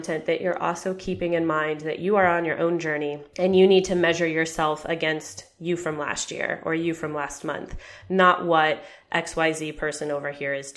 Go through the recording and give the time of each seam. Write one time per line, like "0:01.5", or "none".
0:03.2